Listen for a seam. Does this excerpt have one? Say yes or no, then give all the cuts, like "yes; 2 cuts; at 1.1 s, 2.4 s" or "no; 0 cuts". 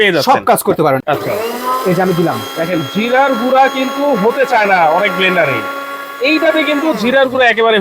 yes; 1 cut; at 1.0 s